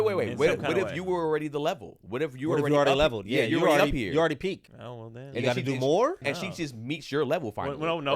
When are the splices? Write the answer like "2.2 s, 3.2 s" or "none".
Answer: 4.7 s, 6.2 s